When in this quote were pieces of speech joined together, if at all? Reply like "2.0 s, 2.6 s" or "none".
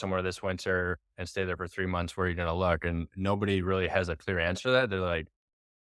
none

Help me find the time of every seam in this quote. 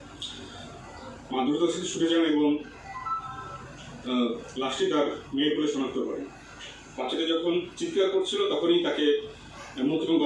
6.9 s

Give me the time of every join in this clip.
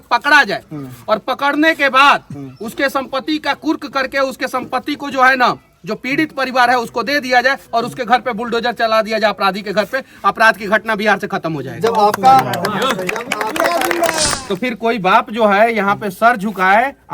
14.6 s

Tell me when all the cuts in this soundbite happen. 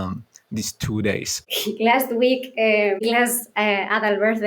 1.4 s, 3.0 s

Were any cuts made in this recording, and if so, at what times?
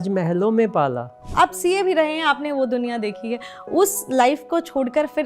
1.3 s

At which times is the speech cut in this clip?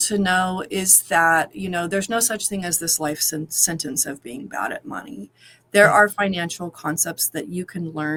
none

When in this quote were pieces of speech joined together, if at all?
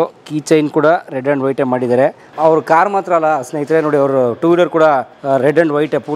2.2 s, 5.1 s

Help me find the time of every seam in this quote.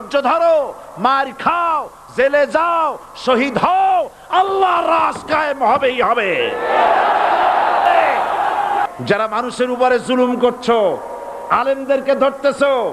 8.9 s

